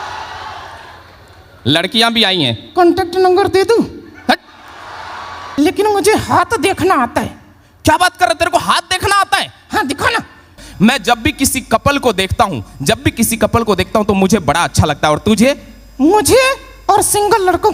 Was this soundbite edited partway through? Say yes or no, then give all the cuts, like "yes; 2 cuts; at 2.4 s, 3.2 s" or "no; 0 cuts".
yes; 2 cuts; at 5.4 s, 10.5 s